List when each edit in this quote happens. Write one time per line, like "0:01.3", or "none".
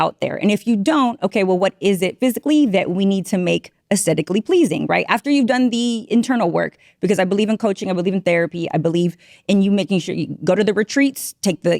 none